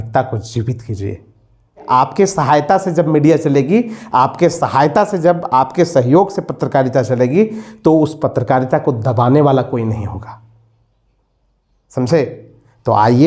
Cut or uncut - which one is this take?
cut